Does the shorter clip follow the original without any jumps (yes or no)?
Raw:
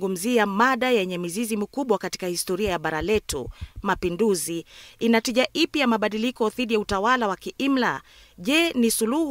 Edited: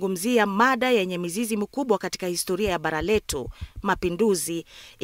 yes